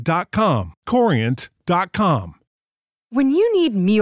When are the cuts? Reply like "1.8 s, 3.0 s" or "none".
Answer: 2.5 s